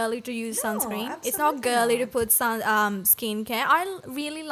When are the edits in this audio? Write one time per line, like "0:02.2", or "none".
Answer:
none